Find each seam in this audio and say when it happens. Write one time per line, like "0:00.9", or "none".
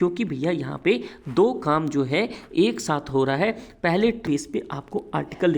0:04.2